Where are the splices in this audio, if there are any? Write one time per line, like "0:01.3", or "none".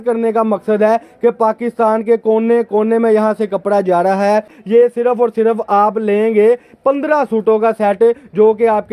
0:04.6